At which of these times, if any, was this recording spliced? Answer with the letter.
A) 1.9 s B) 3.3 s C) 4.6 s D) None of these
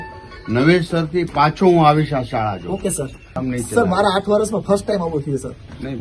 B